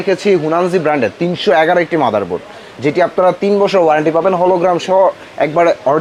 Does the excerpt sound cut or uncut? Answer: uncut